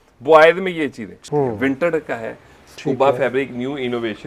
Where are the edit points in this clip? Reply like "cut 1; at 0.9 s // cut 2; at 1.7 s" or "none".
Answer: cut 1; at 1.1 s